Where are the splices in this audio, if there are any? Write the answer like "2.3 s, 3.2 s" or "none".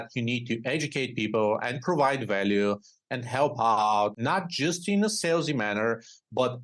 4.2 s